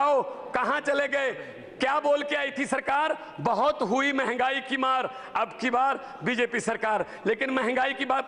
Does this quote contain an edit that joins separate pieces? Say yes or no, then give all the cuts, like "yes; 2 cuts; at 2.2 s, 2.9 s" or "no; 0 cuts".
no; 0 cuts